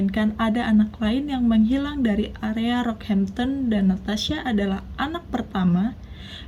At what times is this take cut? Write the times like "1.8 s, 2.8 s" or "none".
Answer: none